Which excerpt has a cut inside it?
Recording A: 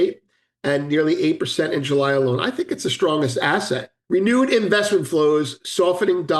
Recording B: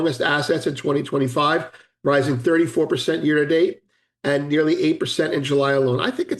A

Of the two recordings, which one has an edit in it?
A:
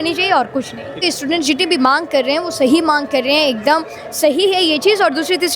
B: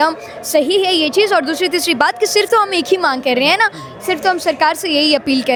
A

